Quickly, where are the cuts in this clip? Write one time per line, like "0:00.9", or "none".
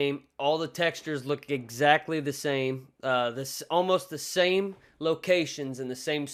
none